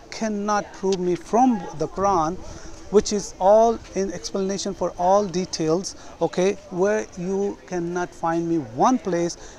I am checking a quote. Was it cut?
no; 0 cuts

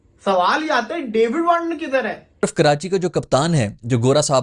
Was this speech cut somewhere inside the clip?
yes; 1 cut; at 2.4 s

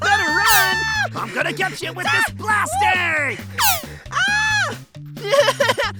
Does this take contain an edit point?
no; 0 cuts

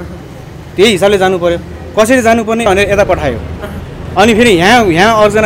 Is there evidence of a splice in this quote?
yes; 1 cut; at 2.7 s

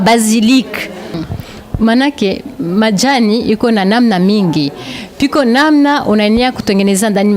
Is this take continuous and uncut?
no; 1 cut; at 1.1 s

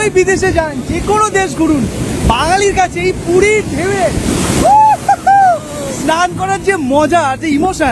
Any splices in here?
no; 0 cuts

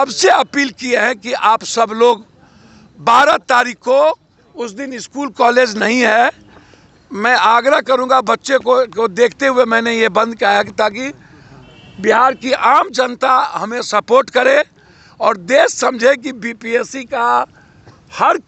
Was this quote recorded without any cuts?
yes; 0 cuts

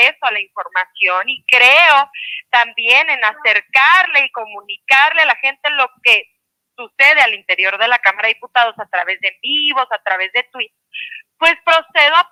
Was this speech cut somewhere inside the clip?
no; 0 cuts

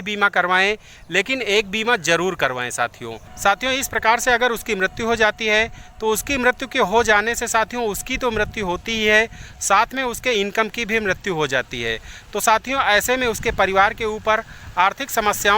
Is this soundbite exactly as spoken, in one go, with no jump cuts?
no; 1 cut; at 3.2 s

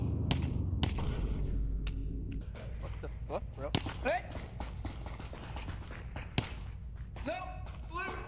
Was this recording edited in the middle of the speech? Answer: yes; 1 cut; at 2.4 s

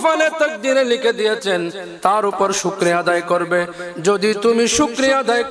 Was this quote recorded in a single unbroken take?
yes; 0 cuts

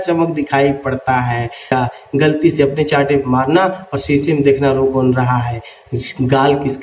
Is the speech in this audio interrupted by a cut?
yes; 1 cut; at 1.7 s

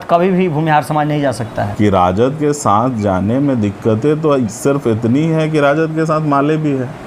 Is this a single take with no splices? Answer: no; 1 cut; at 1.7 s

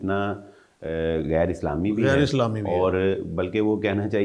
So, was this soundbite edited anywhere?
no; 0 cuts

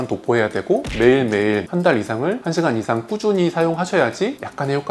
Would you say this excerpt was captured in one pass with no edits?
yes; 0 cuts

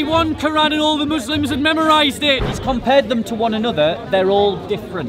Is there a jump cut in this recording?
yes; 1 cut; at 2.5 s

